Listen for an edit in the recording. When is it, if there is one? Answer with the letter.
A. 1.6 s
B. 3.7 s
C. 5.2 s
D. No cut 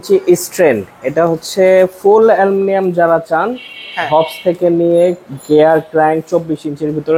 D